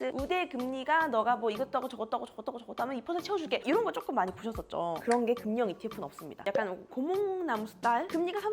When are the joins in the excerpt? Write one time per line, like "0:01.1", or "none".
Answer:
0:06.4